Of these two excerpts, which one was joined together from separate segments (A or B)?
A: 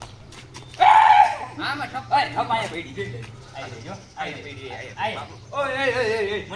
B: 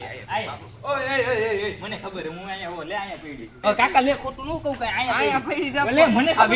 B